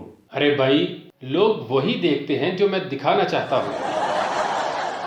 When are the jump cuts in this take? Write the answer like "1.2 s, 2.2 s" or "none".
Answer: 3.9 s